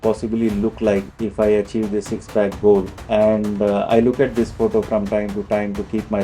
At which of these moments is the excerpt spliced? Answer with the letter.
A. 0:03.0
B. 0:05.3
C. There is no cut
A